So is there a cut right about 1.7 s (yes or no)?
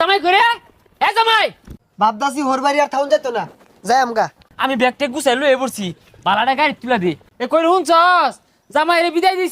yes